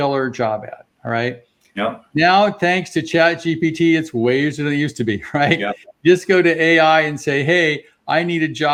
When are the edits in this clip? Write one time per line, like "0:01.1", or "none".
none